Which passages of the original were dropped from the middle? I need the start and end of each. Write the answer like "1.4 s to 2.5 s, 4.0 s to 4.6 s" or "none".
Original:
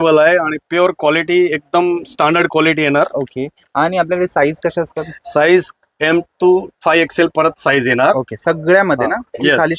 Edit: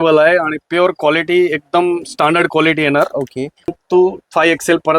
3.7 s to 6.2 s